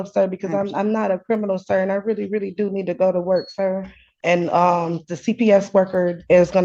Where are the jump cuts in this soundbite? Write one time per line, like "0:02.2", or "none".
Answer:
0:04.2